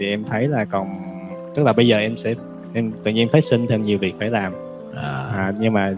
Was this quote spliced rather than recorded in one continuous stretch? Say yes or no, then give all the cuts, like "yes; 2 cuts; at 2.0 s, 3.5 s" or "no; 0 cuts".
no; 0 cuts